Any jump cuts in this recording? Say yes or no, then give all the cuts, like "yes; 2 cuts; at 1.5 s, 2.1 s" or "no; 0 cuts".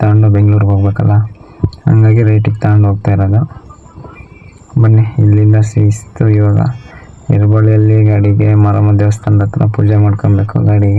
no; 0 cuts